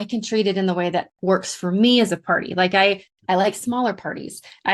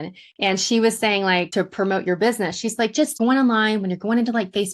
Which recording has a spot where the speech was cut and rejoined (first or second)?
second